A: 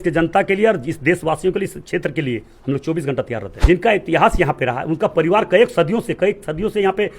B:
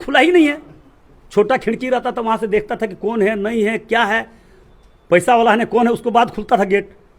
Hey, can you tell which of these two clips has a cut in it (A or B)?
A